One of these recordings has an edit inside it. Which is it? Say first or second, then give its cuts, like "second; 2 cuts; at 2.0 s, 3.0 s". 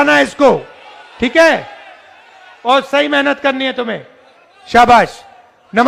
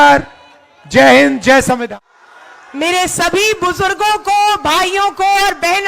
second; 1 cut; at 1.8 s